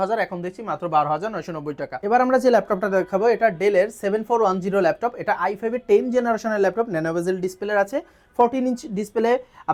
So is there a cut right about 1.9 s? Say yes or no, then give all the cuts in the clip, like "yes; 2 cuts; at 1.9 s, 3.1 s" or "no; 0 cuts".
no; 0 cuts